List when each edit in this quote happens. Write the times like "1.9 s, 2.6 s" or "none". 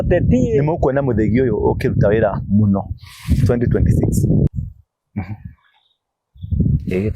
4.5 s